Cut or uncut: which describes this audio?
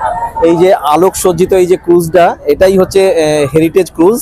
uncut